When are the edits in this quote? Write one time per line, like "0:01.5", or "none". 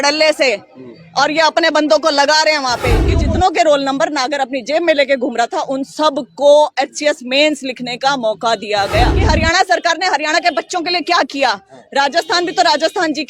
0:03.0
0:09.2